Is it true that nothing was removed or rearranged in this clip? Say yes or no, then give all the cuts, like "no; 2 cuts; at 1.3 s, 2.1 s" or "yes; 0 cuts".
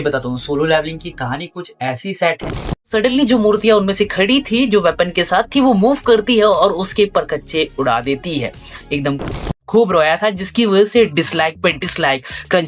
no; 2 cuts; at 2.8 s, 9.2 s